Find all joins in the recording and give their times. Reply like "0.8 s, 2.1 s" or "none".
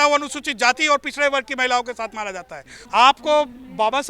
2.7 s